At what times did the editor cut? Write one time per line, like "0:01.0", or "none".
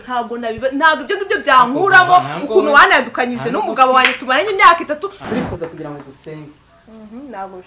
0:05.1